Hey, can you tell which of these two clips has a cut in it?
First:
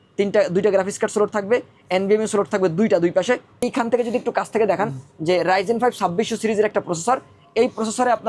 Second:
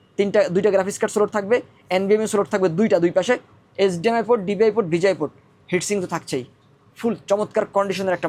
first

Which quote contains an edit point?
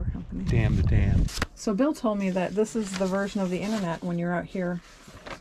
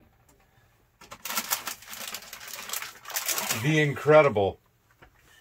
first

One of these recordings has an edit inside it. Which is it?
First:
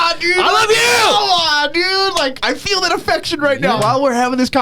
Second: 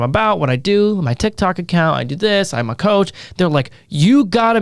first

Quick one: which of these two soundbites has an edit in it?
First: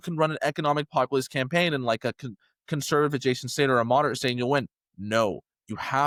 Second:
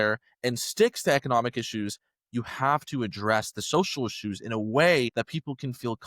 second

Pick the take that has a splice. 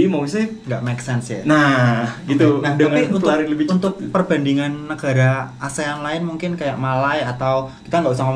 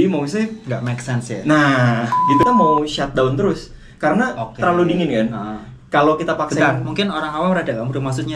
second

